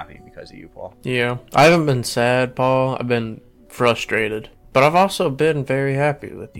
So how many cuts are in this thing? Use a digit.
2